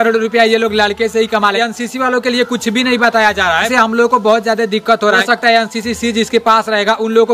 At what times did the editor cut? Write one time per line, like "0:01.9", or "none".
0:01.5
0:03.7
0:05.2